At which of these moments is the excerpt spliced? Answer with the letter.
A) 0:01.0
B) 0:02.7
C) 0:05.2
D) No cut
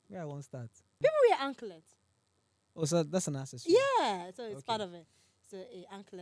A